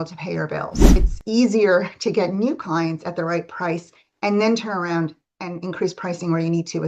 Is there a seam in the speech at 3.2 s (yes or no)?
no